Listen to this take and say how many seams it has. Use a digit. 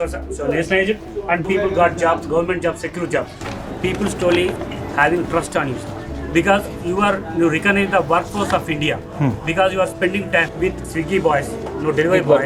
1